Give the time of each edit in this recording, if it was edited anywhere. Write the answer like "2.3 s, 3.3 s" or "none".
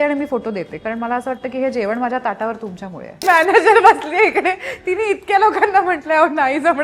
3.2 s